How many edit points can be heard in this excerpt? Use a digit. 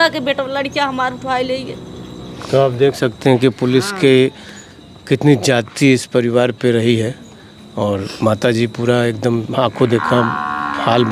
1